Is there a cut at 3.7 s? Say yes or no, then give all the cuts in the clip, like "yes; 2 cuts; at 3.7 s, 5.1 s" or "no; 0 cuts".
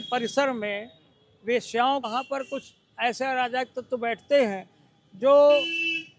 no; 1 cut; at 2.1 s